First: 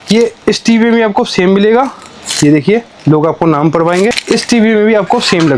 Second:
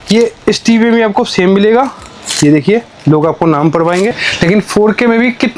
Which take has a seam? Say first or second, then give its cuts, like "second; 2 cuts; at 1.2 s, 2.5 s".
second; 1 cut; at 4.2 s